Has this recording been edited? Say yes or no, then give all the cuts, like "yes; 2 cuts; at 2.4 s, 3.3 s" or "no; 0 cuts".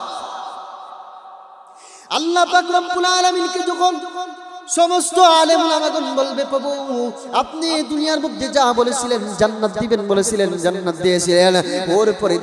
no; 0 cuts